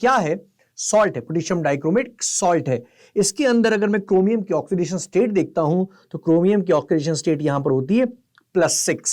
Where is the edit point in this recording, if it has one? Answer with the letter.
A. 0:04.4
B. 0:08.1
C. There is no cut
C